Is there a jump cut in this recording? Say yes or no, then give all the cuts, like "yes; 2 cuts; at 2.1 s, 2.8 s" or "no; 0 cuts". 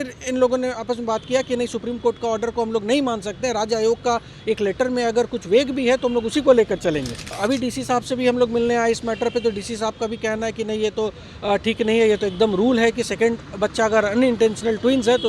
yes; 1 cut; at 7.3 s